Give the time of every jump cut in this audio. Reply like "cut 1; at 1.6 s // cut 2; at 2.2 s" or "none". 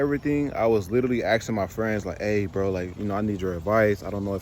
none